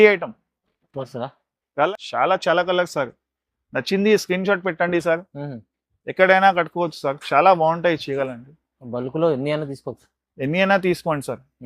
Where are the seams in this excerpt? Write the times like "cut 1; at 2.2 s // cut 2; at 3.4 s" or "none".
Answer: cut 1; at 1.9 s